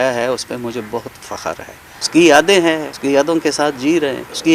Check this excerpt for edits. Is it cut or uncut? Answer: cut